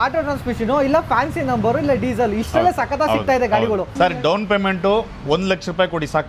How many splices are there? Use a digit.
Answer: 1